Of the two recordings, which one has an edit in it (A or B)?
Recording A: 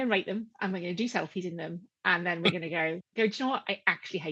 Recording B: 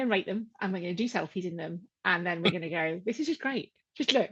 A